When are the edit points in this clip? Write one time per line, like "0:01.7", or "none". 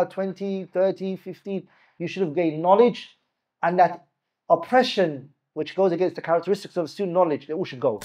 none